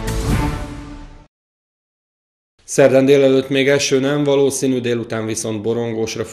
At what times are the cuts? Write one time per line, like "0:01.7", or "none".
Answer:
none